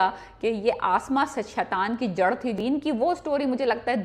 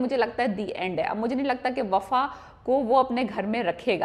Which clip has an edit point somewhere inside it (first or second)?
first